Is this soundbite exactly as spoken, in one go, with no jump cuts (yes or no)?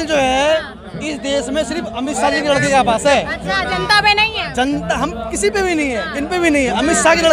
yes